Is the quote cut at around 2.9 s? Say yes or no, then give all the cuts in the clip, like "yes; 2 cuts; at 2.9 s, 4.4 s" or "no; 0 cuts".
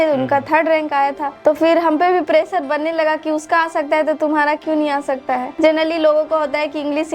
no; 2 cuts; at 1.3 s, 5.5 s